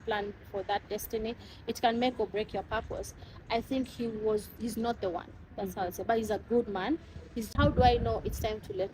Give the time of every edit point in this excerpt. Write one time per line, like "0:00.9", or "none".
0:07.5